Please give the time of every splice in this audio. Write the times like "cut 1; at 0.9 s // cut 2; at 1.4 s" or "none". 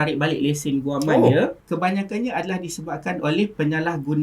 cut 1; at 1.6 s